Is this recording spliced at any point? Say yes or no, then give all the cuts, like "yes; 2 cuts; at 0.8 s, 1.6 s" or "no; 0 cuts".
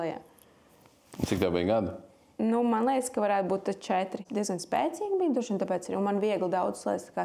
yes; 1 cut; at 4.2 s